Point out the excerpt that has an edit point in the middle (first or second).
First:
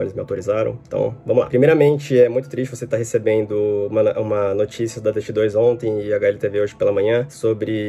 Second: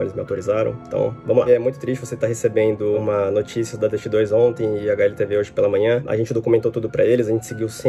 second